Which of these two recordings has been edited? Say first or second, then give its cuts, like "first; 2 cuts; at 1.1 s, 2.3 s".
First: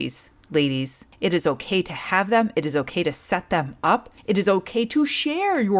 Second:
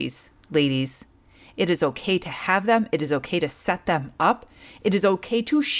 first; 2 cuts; at 1.0 s, 4.1 s